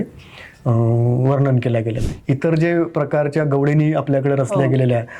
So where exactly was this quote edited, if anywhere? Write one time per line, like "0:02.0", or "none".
0:02.0